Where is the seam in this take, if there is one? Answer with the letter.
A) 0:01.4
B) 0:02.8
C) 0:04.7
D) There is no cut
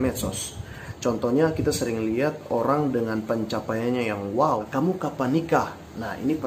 C